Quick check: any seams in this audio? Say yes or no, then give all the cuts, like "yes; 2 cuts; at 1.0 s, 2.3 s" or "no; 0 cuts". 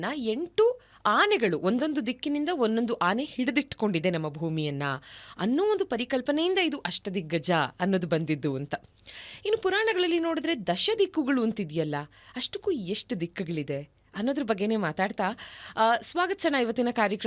no; 0 cuts